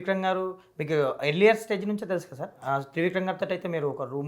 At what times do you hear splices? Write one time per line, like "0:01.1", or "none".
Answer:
none